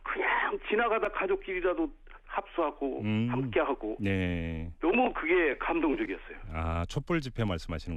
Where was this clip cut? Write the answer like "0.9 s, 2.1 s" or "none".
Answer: none